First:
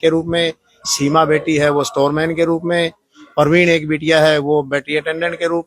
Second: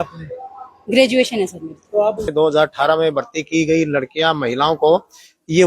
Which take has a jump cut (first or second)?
second